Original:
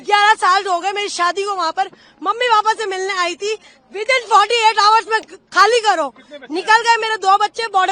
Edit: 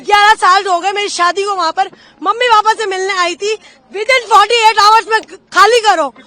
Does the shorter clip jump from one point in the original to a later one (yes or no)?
no